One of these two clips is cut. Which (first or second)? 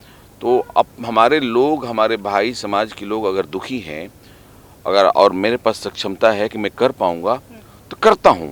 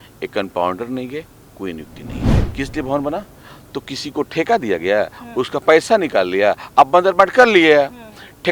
second